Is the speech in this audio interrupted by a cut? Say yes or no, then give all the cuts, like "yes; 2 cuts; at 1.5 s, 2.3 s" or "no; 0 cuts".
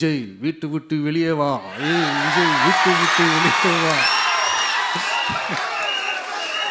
no; 0 cuts